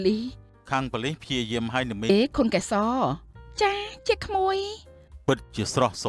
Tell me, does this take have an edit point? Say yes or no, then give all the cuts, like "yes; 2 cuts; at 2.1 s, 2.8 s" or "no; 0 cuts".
yes; 1 cut; at 2.1 s